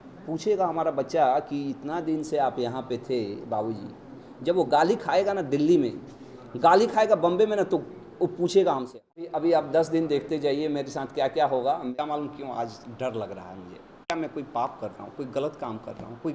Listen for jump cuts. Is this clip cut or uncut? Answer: cut